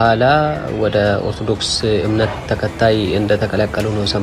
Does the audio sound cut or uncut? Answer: cut